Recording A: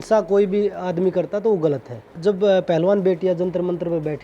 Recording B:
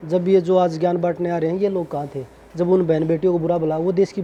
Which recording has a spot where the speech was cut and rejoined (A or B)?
A